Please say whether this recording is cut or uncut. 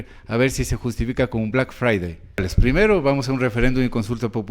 cut